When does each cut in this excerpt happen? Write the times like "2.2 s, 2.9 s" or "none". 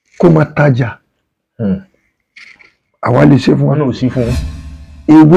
4.5 s